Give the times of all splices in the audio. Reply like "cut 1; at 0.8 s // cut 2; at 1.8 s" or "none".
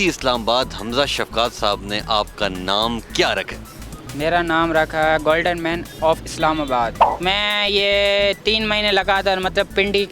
cut 1; at 7.1 s